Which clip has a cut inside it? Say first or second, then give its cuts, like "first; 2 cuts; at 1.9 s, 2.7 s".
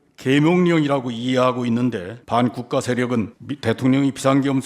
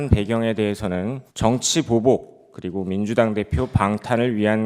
first; 2 cuts; at 2.1 s, 3.4 s